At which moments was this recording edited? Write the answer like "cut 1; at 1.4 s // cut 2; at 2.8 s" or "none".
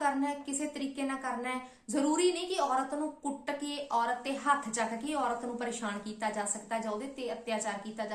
none